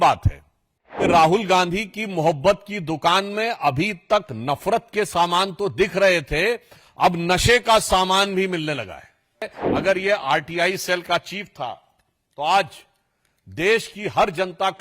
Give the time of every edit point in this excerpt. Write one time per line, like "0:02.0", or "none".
0:01.0
0:09.6